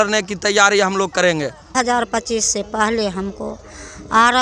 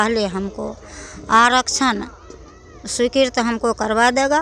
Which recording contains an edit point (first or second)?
first